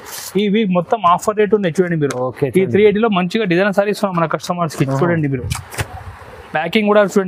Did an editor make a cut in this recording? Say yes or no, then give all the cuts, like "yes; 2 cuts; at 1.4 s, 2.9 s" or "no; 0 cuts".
no; 0 cuts